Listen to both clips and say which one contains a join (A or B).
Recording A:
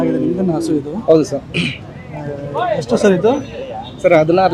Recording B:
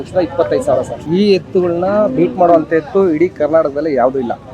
B